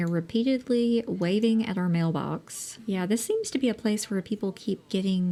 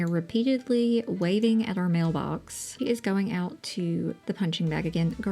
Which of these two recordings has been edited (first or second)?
second